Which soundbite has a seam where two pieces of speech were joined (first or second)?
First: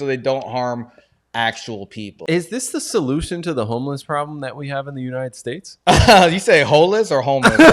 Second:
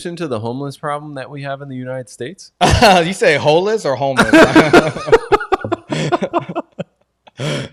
first